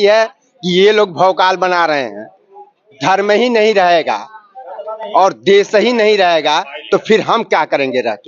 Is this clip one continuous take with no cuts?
no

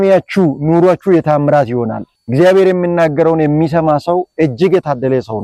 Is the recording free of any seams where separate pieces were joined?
yes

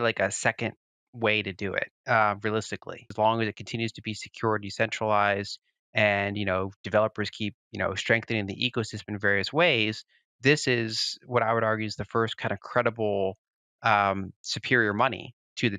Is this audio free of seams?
no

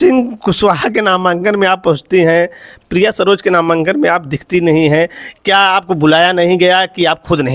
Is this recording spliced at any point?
no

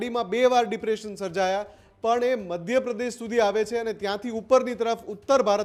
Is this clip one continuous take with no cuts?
yes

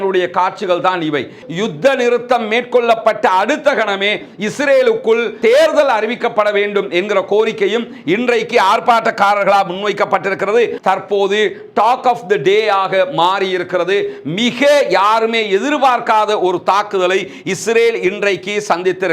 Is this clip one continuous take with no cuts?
no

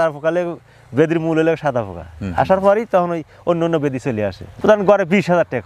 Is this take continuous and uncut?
no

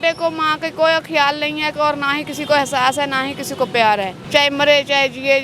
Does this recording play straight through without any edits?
no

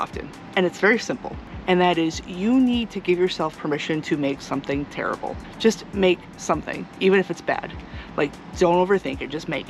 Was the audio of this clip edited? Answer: no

